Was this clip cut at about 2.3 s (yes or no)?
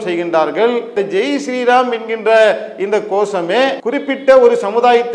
no